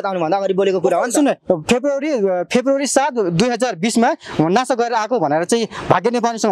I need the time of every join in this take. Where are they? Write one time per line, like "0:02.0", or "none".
none